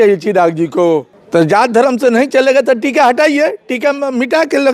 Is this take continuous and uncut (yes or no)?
no